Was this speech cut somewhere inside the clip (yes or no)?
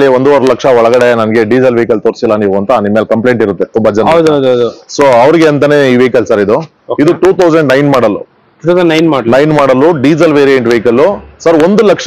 no